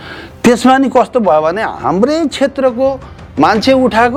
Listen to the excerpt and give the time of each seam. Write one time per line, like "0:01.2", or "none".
none

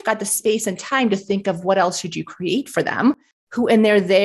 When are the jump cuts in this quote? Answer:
0:03.2

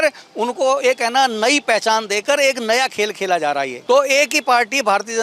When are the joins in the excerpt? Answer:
0:03.8

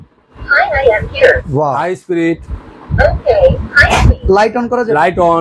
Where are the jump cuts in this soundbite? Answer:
none

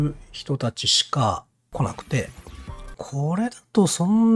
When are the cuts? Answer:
0:01.7
0:03.0

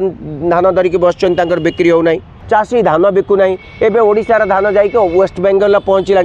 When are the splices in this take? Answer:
0:02.3

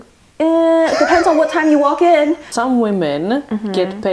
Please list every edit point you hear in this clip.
0:02.5

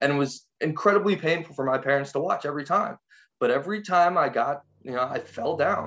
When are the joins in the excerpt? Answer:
0:04.7

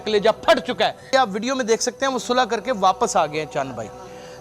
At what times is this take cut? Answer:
0:01.0

